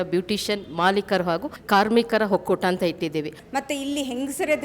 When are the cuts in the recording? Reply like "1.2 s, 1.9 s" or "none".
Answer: 1.5 s, 3.4 s